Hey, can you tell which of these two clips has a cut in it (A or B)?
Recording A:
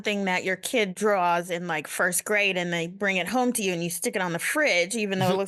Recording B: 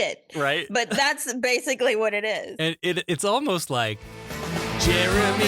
B